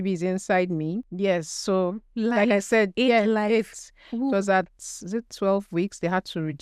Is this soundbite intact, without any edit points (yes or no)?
no